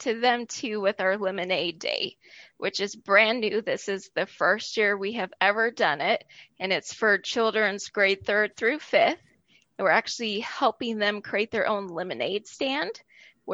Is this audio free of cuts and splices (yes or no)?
yes